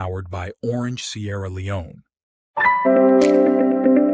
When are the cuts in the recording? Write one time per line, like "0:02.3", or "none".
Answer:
0:02.9